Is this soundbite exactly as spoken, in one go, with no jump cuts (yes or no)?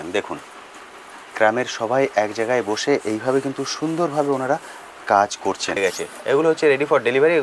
no